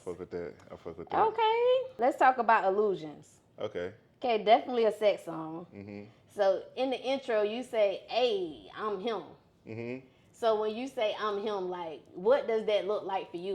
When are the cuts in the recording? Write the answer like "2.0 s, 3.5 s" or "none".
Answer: 1.9 s